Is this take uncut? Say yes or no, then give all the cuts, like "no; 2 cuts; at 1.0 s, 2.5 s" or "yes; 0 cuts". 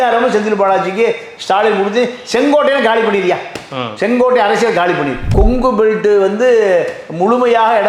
no; 1 cut; at 5.2 s